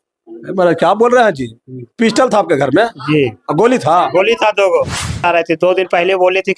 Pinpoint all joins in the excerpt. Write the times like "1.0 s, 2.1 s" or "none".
5.2 s

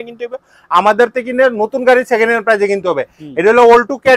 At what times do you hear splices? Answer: none

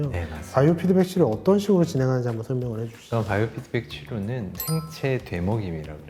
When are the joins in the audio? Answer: none

